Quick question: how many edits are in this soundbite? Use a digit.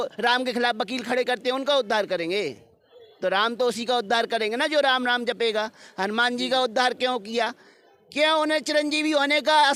0